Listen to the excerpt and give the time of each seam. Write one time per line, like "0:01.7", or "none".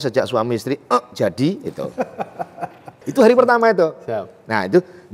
0:03.0